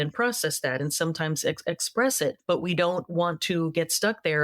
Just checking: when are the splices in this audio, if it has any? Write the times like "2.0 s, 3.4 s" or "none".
2.4 s